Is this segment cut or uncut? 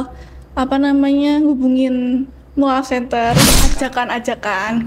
cut